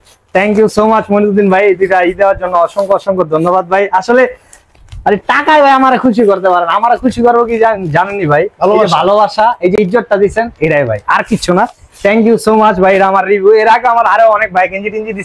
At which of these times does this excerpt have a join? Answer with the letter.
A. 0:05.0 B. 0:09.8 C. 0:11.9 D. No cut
D